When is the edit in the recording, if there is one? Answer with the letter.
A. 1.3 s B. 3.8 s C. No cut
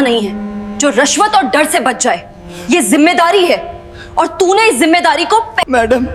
C